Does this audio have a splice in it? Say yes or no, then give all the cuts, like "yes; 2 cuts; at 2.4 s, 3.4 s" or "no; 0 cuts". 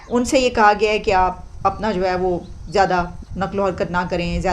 no; 0 cuts